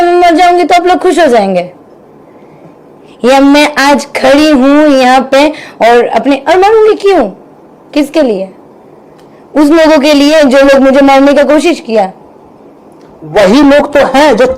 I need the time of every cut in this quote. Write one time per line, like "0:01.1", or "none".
none